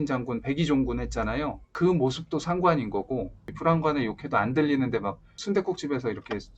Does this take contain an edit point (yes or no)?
yes